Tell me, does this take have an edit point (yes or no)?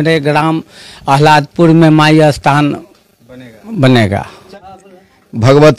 yes